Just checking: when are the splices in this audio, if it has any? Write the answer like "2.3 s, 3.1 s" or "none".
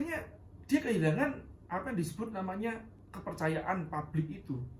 2.9 s